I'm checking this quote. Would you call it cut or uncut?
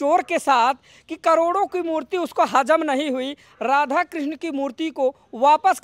uncut